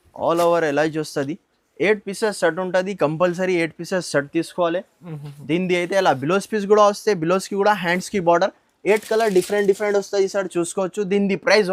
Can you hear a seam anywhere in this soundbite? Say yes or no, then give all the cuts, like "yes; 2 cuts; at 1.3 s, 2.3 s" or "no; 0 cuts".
no; 0 cuts